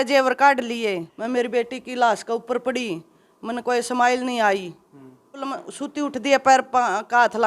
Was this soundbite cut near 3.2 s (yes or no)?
no